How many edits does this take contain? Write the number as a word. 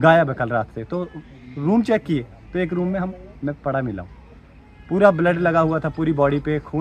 zero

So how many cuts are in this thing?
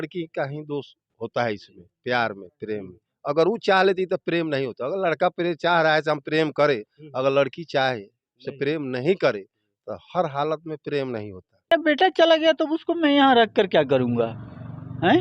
one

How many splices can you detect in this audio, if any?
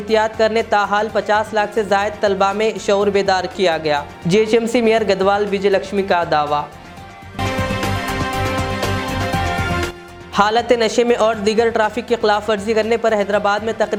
zero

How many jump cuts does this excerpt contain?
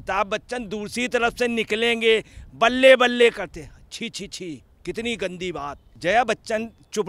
one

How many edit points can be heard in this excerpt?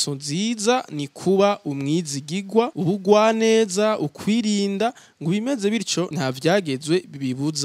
two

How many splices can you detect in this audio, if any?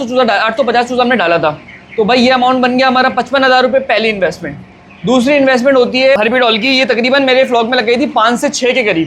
one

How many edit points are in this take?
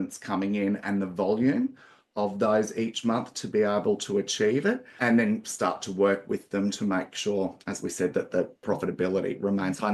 two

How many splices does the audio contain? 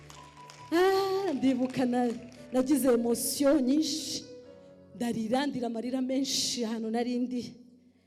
zero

